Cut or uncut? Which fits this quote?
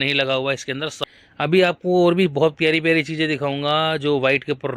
cut